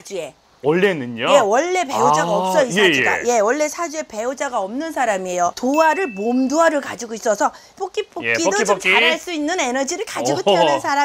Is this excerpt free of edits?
no; 2 cuts; at 5.6 s, 7.8 s

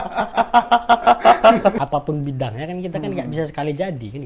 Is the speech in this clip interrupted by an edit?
yes; 1 cut; at 1.8 s

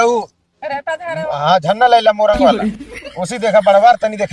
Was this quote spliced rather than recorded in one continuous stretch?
no; 0 cuts

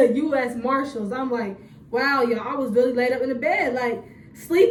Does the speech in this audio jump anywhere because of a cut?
no; 0 cuts

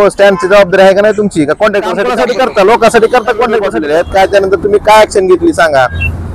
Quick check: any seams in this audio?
yes; 2 cuts; at 2.1 s, 3.7 s

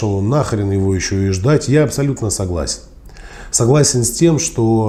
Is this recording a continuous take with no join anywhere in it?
yes; 0 cuts

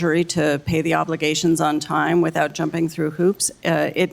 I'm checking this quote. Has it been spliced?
yes; 1 cut; at 2.3 s

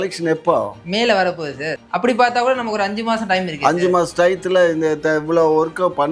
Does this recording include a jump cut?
yes; 1 cut; at 1.6 s

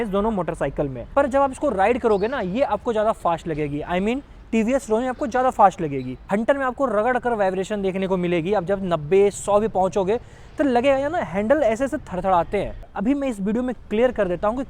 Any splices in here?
yes; 3 cuts; at 1.0 s, 6.2 s, 12.9 s

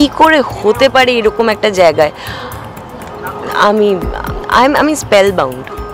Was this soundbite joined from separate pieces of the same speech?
no; 0 cuts

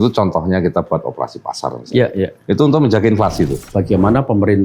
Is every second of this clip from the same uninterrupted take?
no; 1 cut; at 3.6 s

